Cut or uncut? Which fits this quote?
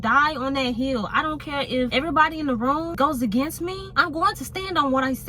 cut